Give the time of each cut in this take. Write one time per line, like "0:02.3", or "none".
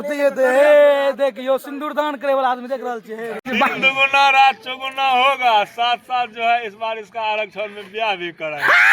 0:03.4